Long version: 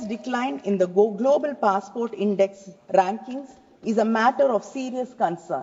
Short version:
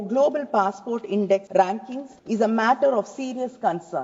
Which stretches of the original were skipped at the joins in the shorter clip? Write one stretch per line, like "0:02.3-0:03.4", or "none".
0:02.8-0:03.3

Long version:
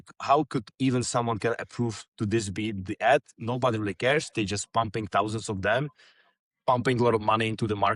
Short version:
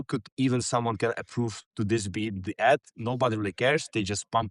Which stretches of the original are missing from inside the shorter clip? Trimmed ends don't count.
none

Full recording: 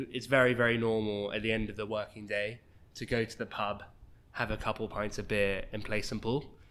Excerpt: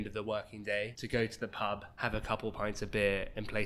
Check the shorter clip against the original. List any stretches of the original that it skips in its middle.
0:02.6-0:03.0
0:03.9-0:04.3

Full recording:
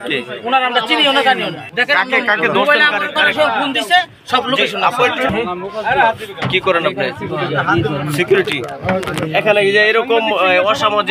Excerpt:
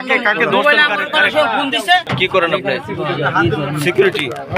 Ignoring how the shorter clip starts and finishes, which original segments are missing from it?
0:04.1-0:06.4

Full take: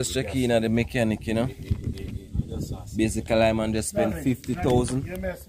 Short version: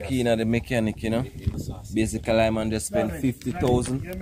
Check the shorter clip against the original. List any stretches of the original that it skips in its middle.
0:01.8-0:02.6

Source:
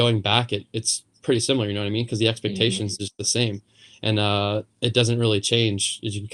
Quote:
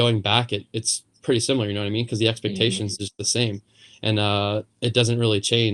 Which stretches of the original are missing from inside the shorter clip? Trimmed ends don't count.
none

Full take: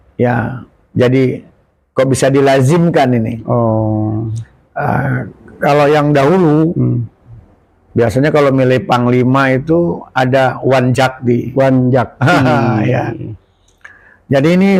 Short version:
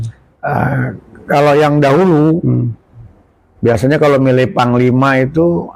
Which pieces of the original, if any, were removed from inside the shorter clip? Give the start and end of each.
none

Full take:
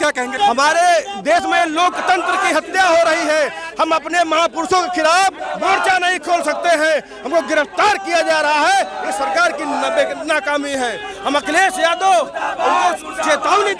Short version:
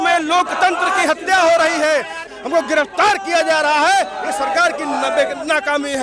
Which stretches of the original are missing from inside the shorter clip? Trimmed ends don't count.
0:03.7-0:07.1

